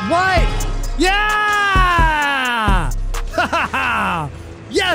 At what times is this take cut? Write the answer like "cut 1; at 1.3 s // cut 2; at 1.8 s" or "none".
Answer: none